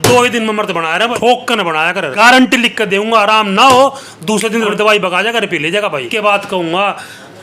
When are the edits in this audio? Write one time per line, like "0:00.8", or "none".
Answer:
0:01.1
0:02.1
0:04.3
0:06.1